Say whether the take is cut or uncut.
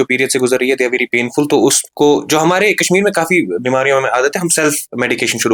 uncut